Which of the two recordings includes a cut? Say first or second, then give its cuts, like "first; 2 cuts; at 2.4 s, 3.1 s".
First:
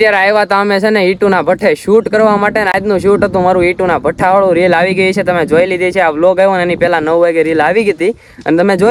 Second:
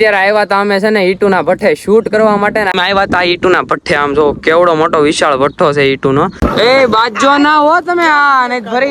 second; 2 cuts; at 2.7 s, 6.4 s